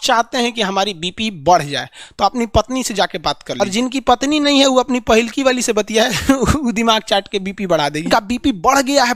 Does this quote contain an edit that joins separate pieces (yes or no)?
yes